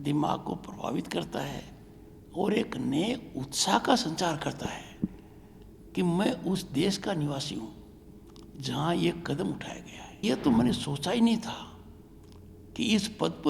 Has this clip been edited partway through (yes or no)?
yes